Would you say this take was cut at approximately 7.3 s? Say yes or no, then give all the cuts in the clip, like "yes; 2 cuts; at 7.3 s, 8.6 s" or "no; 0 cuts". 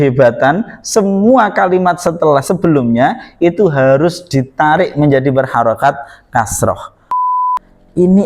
yes; 1 cut; at 7.3 s